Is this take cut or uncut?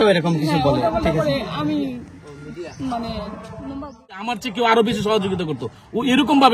cut